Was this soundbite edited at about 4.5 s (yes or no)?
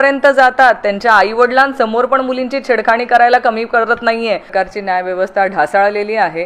yes